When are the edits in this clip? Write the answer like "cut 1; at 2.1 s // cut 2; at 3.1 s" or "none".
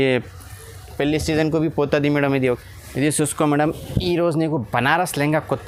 cut 1; at 2.6 s